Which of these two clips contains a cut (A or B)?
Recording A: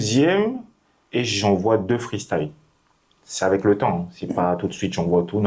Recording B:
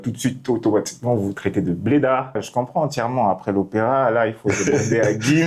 B